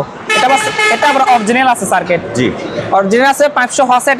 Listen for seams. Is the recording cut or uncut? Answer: uncut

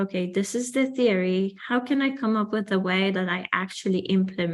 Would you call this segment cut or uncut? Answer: uncut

